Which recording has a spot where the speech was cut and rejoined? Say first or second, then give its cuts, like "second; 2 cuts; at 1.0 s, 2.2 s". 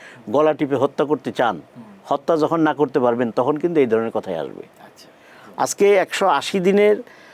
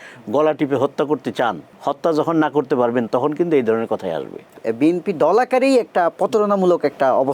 second; 2 cuts; at 1.7 s, 4.6 s